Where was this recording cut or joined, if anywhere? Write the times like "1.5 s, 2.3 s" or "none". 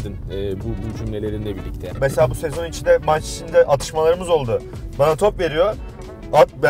1.8 s

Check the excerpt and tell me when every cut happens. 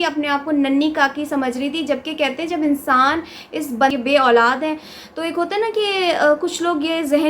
3.9 s

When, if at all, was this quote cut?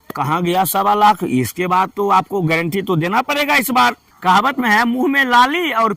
4.1 s

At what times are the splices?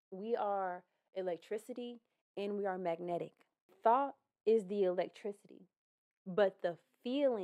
3.7 s

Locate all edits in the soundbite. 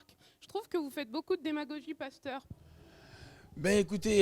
2.4 s

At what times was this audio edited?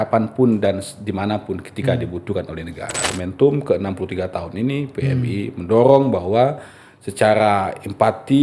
3.1 s

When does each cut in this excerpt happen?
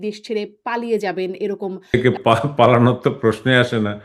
1.9 s

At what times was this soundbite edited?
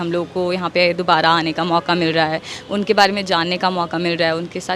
none

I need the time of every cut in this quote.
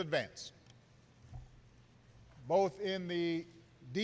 1.8 s

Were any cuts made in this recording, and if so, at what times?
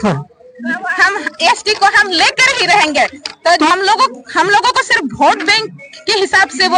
3.7 s

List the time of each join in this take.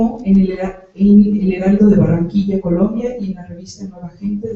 3.2 s

